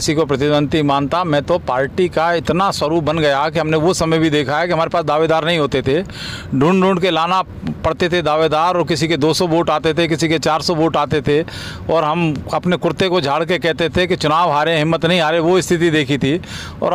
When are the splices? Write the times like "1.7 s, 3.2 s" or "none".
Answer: none